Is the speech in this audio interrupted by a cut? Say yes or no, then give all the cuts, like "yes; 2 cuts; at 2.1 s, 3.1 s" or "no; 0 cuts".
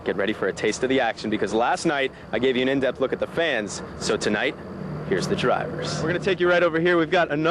yes; 1 cut; at 6.0 s